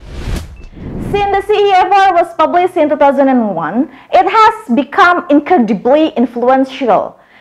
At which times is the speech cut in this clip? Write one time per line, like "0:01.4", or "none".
0:01.1